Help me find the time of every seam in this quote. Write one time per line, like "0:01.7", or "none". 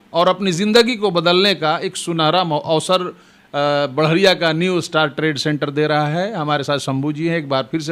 none